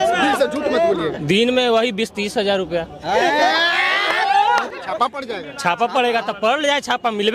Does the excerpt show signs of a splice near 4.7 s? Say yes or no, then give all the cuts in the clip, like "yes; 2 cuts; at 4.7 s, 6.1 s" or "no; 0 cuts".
yes; 1 cut; at 4.7 s